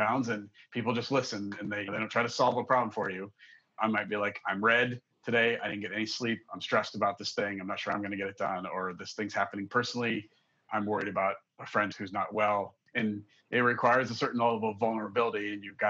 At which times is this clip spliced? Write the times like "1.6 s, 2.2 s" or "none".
3.8 s, 10.7 s